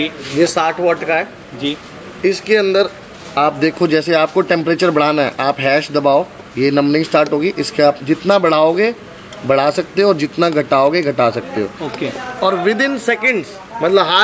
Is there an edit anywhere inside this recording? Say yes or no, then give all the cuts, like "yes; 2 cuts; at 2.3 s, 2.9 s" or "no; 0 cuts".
no; 0 cuts